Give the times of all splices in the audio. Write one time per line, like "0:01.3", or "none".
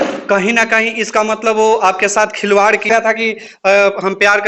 0:02.9